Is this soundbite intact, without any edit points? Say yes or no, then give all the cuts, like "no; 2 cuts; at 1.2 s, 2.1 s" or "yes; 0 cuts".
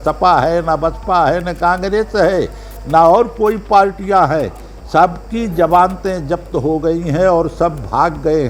yes; 0 cuts